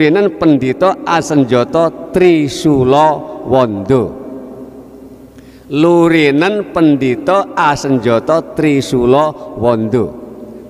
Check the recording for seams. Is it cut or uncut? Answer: uncut